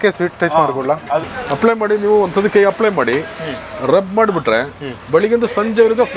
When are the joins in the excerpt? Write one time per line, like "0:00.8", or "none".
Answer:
0:01.3